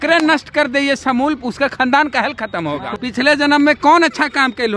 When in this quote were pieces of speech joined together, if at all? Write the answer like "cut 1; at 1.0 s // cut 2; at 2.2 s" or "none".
cut 1; at 2.9 s

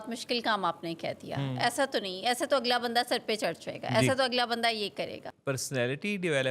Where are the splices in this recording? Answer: cut 1; at 5.3 s

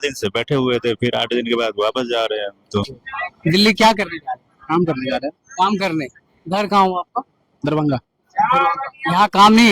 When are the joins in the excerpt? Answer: cut 1; at 3.0 s

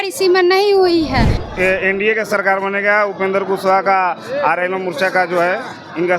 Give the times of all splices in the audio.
cut 1; at 1.4 s

